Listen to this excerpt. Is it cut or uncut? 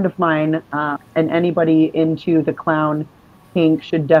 cut